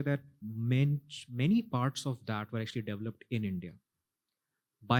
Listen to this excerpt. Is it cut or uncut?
uncut